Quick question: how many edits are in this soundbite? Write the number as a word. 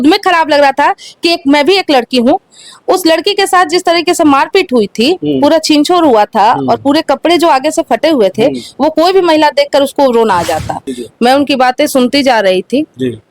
one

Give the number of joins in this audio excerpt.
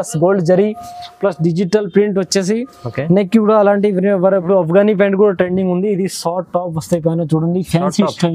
one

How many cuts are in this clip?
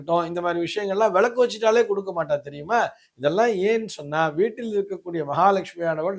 zero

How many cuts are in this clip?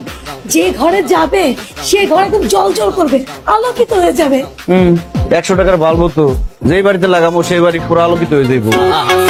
zero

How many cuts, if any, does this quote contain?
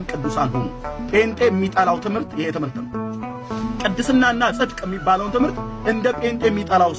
zero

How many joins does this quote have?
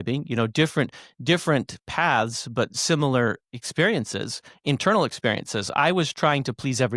zero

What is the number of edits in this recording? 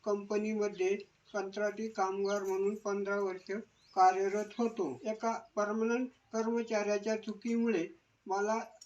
one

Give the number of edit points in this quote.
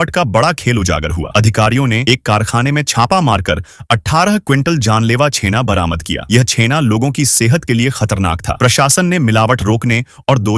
zero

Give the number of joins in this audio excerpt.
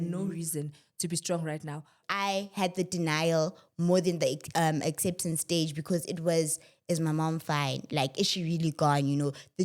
one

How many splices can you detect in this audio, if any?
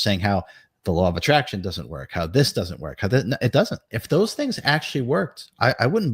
one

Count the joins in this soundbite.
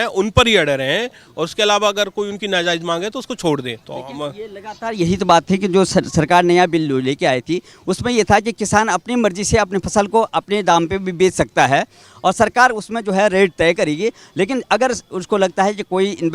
zero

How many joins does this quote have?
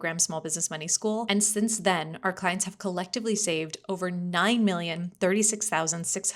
one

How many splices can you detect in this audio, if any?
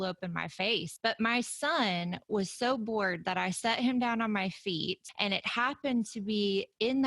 two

